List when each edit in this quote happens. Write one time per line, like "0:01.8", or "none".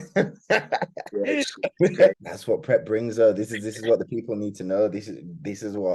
0:02.1